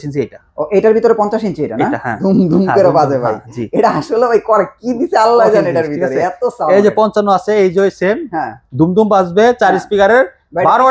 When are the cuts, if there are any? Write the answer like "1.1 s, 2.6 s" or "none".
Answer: 2.1 s